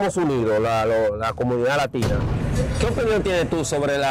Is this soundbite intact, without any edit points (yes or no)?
no